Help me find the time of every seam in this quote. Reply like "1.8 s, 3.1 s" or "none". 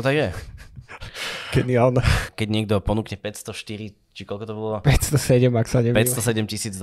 2.3 s